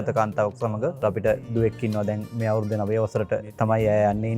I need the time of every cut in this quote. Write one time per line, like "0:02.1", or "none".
0:01.3
0:02.3
0:03.5